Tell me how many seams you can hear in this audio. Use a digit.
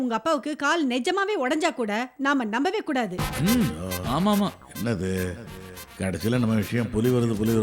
0